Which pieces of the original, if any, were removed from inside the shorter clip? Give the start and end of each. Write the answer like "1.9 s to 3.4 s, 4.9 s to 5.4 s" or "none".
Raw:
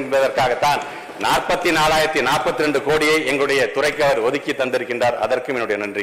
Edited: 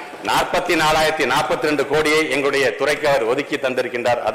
none